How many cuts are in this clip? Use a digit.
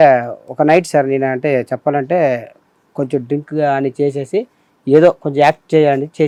0